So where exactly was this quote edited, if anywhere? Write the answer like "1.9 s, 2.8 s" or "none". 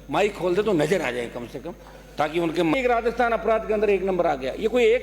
2.7 s